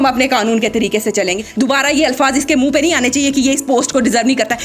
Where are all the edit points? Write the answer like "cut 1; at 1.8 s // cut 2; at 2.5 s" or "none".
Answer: cut 1; at 1.4 s